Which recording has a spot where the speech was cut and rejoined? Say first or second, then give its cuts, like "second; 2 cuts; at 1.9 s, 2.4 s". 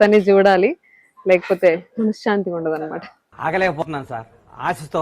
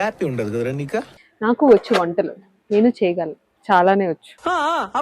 second; 1 cut; at 1.2 s